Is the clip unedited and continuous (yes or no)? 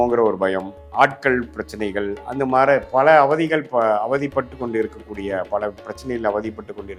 yes